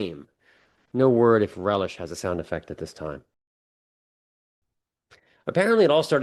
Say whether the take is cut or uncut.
uncut